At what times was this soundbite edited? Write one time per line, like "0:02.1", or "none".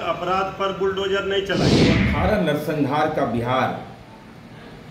0:01.8